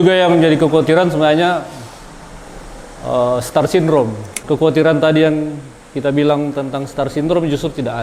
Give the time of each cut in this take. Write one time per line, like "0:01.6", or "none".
0:04.4